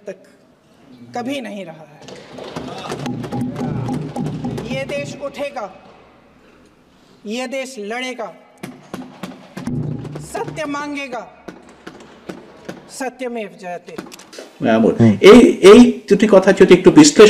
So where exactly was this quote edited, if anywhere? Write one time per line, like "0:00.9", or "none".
none